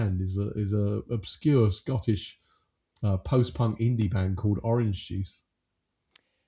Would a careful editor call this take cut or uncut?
uncut